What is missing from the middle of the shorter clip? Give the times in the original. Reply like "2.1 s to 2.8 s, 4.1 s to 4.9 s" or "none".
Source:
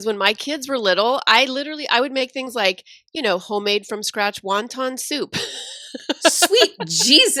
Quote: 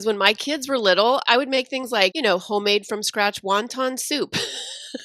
1.2 s to 1.9 s, 2.8 s to 3.2 s